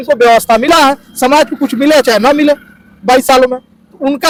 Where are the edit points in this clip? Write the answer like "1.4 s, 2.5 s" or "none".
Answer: none

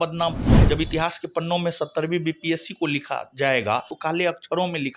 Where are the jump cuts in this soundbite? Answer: 3.9 s

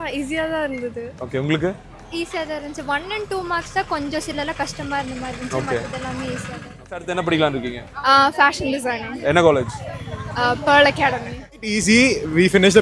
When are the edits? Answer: 7.0 s, 11.6 s

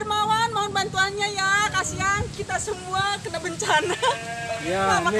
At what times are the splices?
none

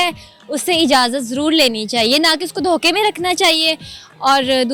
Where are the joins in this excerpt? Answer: none

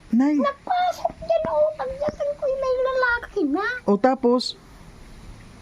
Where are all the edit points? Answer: none

